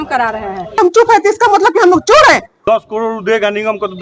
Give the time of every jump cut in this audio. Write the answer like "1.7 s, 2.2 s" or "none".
0.7 s, 2.5 s

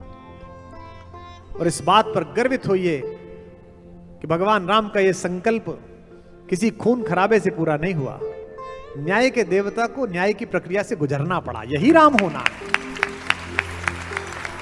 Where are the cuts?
none

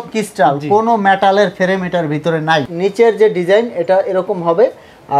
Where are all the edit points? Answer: 2.7 s

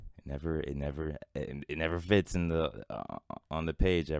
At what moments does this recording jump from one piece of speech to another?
none

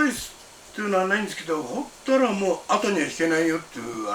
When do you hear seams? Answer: none

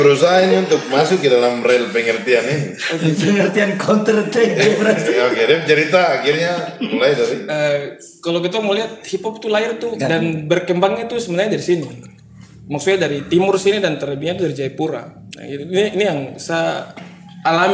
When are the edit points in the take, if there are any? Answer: none

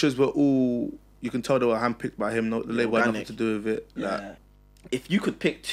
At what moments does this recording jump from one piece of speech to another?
4.3 s

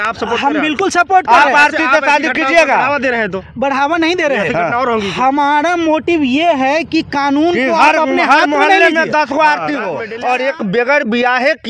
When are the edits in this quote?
10.0 s

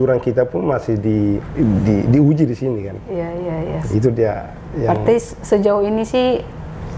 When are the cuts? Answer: 1.5 s

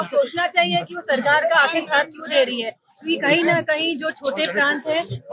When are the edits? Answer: none

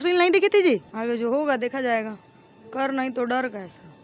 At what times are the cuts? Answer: 0.9 s

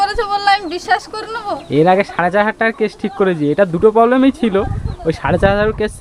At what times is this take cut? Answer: none

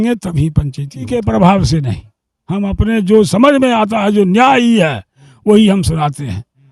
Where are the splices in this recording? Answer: 1.1 s

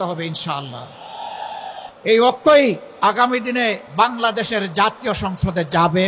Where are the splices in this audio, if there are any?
1.9 s, 2.9 s, 3.8 s

